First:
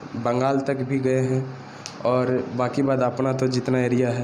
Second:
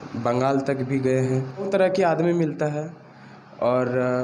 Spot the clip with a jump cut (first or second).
second